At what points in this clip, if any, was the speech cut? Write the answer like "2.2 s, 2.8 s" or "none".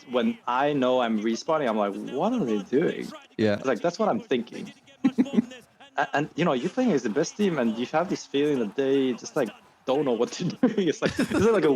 none